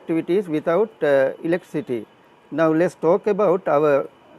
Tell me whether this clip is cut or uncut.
uncut